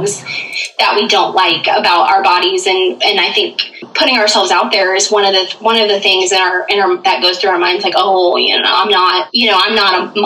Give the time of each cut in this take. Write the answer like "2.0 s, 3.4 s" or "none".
3.9 s, 9.3 s